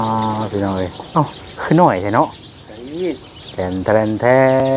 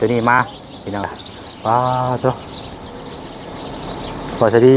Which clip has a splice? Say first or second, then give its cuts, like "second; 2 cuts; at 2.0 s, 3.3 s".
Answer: second; 1 cut; at 1.1 s